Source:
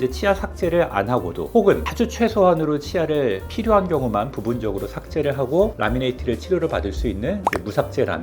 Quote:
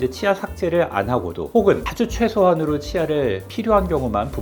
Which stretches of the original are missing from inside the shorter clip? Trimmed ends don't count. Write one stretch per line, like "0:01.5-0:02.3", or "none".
none